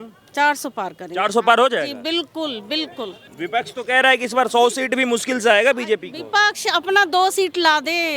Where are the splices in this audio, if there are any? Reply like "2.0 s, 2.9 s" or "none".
3.2 s